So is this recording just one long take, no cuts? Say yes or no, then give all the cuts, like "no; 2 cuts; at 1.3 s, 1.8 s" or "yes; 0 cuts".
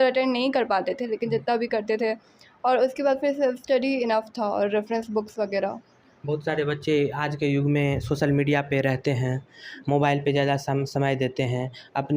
yes; 0 cuts